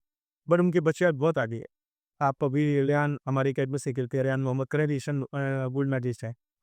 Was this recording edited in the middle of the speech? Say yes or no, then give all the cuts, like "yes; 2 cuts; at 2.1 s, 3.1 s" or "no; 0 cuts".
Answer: no; 0 cuts